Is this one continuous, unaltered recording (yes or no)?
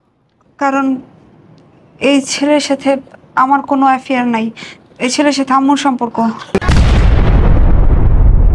no